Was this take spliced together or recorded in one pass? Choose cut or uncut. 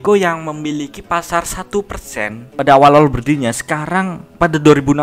cut